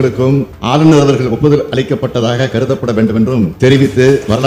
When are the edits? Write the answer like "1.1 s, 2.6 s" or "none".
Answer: none

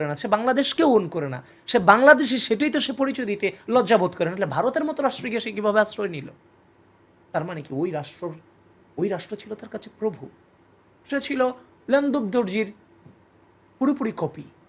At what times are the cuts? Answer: none

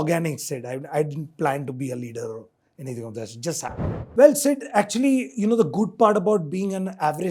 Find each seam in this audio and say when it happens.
3.7 s

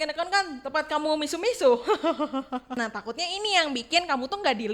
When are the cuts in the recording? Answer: 2.9 s

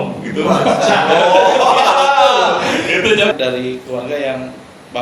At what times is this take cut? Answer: 3.3 s

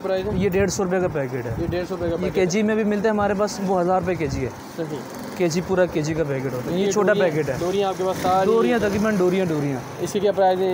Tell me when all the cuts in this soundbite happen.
none

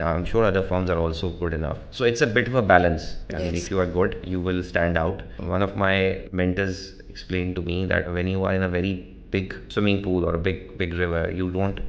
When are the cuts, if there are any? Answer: 1.9 s, 3.1 s, 4.2 s, 5.3 s, 6.2 s, 8.1 s, 9.6 s

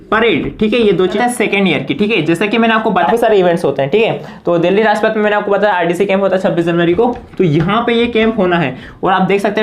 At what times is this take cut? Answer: 1.1 s, 2.9 s

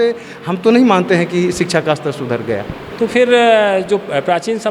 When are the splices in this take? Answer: 2.8 s

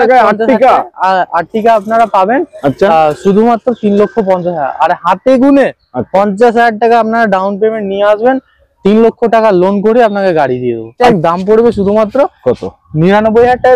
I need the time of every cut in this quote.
10.9 s

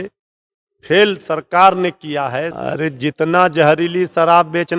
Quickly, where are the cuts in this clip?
2.5 s

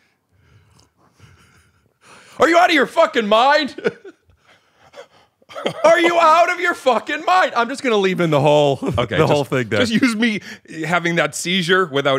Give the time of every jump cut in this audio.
none

